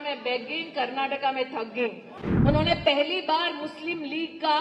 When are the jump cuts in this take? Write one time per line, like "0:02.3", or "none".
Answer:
0:02.1

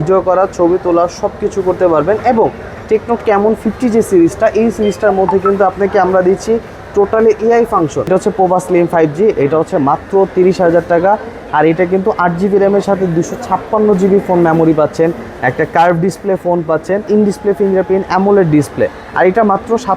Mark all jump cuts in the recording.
0:08.1
0:17.1

